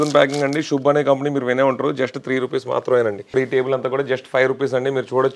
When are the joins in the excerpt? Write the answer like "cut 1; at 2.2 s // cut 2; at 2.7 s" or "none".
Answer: cut 1; at 3.4 s